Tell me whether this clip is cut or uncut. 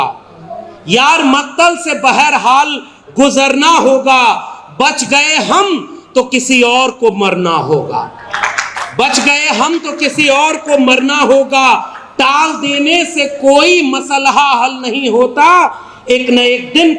uncut